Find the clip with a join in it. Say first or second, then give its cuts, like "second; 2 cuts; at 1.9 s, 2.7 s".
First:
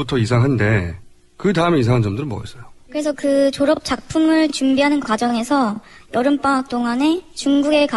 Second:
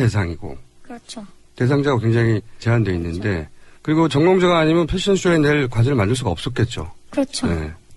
first; 1 cut; at 3.3 s